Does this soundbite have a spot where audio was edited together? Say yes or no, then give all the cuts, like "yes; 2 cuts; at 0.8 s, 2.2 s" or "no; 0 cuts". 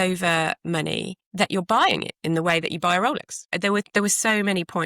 yes; 2 cuts; at 1.2 s, 3.5 s